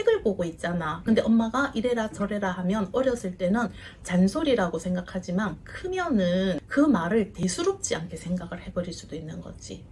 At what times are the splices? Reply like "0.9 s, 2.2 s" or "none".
none